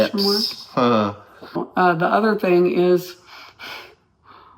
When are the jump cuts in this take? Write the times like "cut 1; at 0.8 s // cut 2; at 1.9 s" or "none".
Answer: cut 1; at 1.6 s